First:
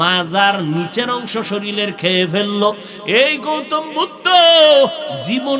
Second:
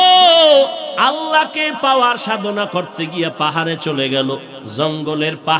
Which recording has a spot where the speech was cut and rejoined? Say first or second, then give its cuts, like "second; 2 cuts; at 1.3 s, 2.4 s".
second; 2 cuts; at 0.8 s, 4.6 s